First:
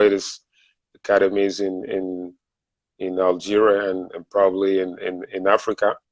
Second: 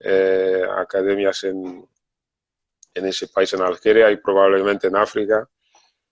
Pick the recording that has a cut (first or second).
first